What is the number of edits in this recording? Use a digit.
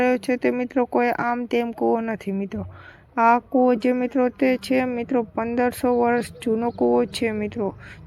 1